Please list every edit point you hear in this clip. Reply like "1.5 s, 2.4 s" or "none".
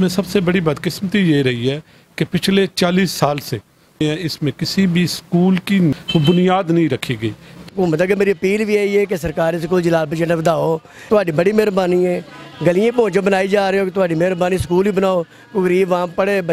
5.9 s, 7.7 s, 11.0 s